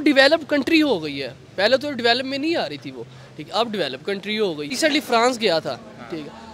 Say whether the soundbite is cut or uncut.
cut